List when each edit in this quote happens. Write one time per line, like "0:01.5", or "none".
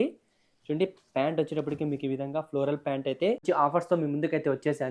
0:03.4